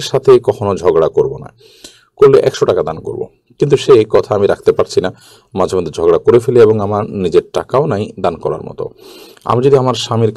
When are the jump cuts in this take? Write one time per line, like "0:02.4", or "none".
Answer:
none